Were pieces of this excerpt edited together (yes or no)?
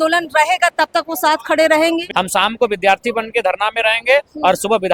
yes